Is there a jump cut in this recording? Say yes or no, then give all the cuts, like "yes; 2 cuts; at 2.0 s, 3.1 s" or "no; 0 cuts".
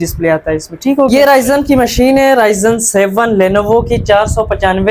yes; 1 cut; at 1.1 s